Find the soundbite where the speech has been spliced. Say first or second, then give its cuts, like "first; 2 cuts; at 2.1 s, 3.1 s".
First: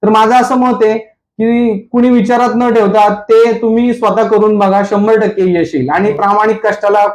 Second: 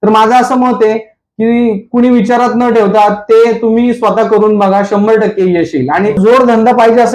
second; 1 cut; at 6.2 s